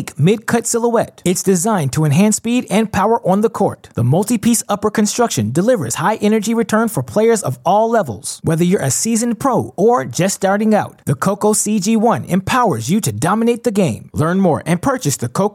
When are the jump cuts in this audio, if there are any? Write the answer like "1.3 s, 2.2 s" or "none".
none